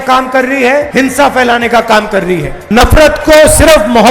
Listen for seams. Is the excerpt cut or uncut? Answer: cut